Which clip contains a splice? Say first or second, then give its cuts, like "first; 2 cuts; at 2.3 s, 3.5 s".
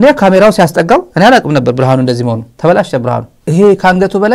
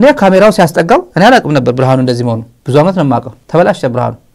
first; 2 cuts; at 2.5 s, 3.3 s